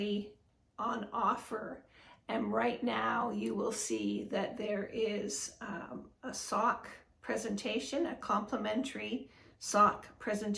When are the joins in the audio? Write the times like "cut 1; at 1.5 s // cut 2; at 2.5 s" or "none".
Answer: none